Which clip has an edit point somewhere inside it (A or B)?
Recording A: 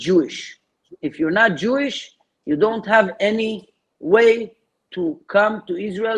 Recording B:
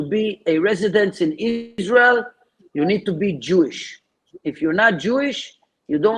B